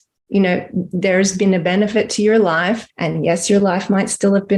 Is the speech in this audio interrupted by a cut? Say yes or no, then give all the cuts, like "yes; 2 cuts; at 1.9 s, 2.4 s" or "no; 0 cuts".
yes; 1 cut; at 2.9 s